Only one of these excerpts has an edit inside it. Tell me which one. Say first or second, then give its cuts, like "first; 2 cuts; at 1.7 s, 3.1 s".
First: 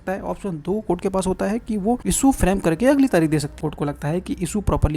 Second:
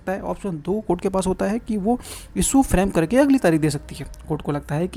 first; 2 cuts; at 2.0 s, 3.5 s